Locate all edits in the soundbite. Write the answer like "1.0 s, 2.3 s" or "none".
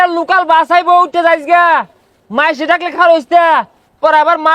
none